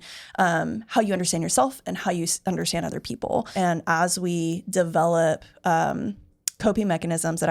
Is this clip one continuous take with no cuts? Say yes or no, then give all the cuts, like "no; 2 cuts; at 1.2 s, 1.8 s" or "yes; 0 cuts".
no; 1 cut; at 3.5 s